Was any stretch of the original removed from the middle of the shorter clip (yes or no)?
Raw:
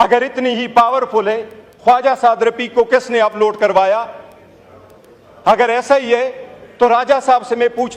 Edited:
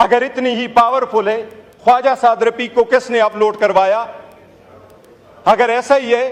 no